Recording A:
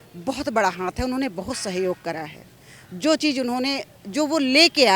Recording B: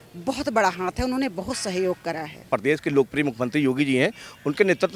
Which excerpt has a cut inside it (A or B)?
B